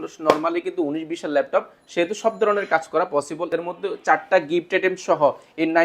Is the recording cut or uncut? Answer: cut